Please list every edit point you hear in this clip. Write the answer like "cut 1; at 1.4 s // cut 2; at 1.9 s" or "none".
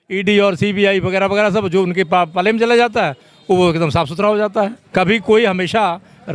cut 1; at 4.8 s